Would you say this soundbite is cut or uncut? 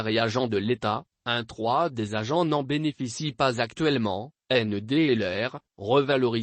cut